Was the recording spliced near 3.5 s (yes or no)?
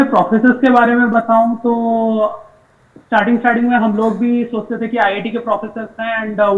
no